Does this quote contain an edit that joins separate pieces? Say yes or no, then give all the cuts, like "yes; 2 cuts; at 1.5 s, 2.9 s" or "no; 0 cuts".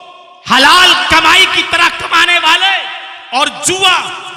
no; 0 cuts